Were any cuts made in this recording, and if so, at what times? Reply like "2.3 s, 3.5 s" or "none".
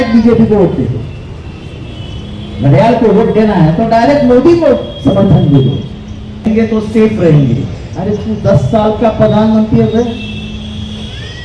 6.5 s